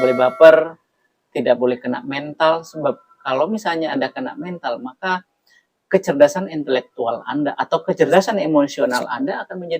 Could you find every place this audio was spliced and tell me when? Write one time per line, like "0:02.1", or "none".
0:08.1